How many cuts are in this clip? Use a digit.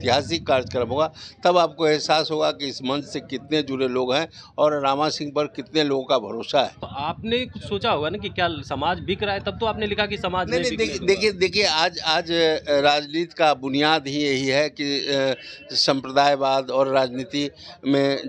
1